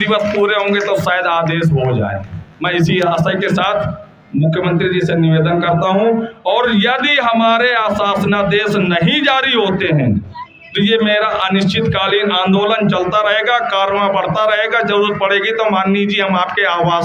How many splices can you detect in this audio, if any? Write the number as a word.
zero